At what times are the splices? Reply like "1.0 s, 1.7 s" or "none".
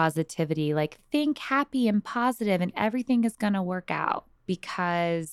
4.3 s